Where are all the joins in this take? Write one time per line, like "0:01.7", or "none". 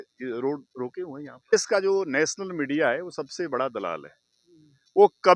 0:01.5